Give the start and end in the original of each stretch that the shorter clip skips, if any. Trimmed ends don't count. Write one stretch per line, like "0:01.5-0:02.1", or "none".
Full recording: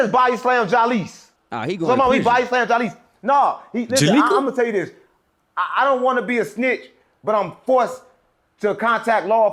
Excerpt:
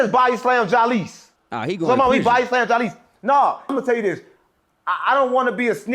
0:03.7-0:04.4

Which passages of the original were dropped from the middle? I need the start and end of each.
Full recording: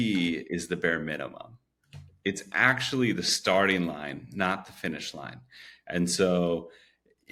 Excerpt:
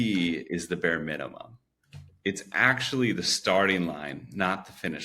none

